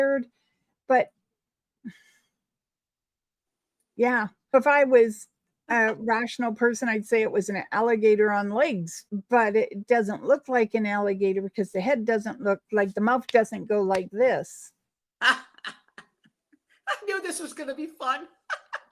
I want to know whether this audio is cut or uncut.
cut